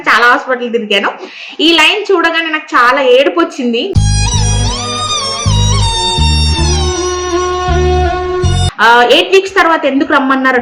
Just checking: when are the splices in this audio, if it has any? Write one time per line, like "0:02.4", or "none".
0:08.6